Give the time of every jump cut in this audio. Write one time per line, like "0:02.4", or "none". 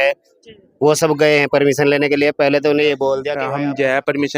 0:03.4